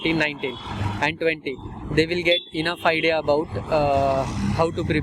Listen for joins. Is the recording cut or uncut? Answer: uncut